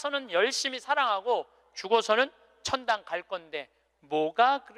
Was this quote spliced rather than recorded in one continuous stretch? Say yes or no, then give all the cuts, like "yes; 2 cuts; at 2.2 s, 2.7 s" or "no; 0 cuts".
no; 0 cuts